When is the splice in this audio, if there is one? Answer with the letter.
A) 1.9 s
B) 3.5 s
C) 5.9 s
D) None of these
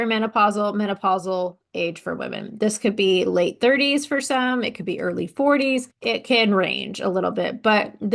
C